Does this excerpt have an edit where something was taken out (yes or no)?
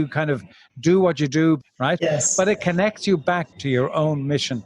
yes